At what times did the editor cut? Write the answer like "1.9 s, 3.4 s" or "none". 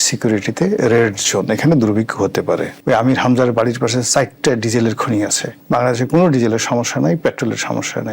2.8 s, 5.5 s